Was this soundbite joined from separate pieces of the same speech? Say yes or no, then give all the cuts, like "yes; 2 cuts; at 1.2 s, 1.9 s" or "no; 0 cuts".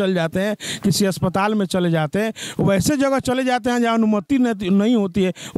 no; 0 cuts